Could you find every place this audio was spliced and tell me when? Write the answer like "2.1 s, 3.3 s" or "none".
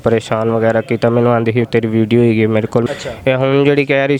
2.8 s